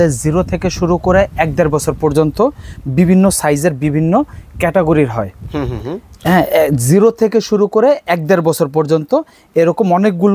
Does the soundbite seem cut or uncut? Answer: uncut